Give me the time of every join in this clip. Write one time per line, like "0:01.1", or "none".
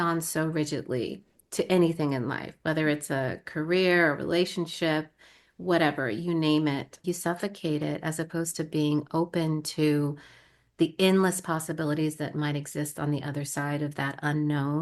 0:07.0